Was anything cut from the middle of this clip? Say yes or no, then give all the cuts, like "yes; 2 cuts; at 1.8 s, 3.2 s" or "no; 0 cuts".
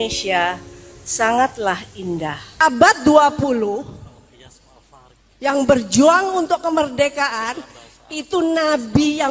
yes; 1 cut; at 2.6 s